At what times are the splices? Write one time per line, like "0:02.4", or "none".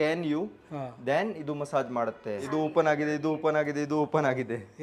0:02.5